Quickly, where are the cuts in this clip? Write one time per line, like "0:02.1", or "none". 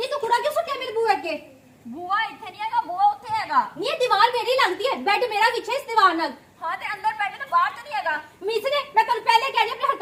none